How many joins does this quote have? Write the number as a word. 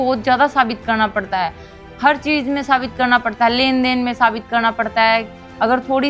zero